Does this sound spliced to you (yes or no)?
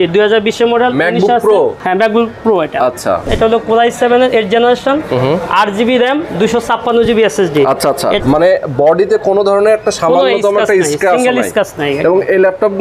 yes